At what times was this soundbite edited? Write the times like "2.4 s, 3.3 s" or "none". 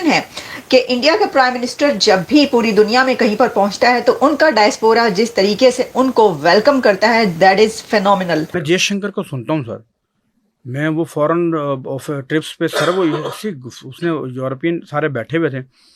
8.5 s